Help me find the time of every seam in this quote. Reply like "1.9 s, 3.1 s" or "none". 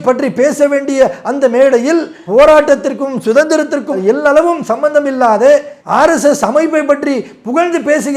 none